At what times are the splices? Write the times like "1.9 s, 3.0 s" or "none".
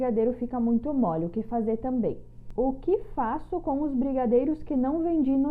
2.4 s